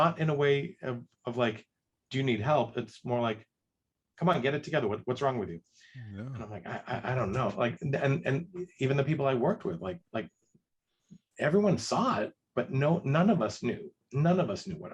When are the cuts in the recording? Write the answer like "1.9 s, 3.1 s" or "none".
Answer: none

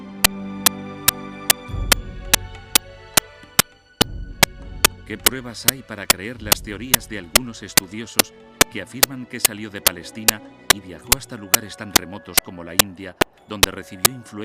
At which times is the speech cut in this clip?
2.1 s

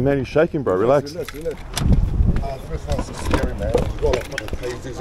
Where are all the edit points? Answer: 1.6 s

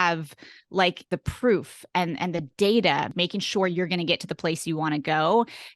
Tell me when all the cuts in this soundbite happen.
3.1 s

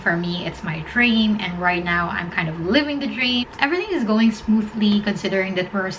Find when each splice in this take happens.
3.5 s

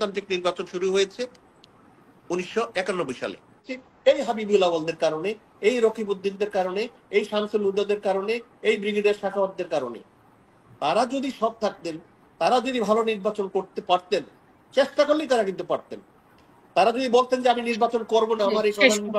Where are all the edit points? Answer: 3.8 s

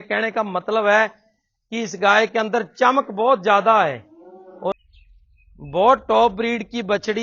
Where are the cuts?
4.7 s

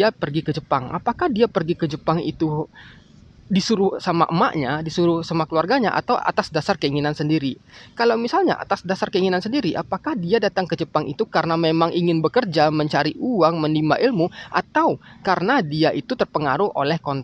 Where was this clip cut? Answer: none

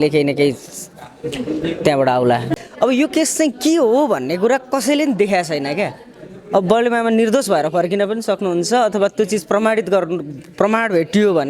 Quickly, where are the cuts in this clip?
2.5 s

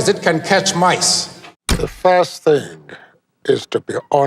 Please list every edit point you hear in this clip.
none

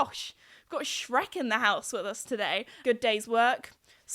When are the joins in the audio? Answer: 2.7 s

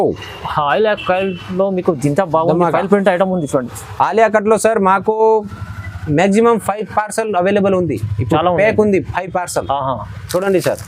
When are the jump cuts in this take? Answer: none

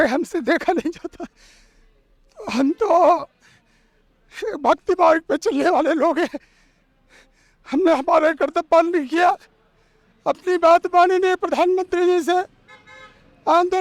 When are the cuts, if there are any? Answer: none

